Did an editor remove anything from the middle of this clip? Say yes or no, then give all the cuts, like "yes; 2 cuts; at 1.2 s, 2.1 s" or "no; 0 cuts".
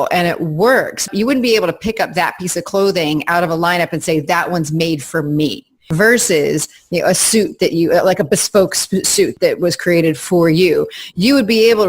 yes; 3 cuts; at 1.1 s, 5.9 s, 9.3 s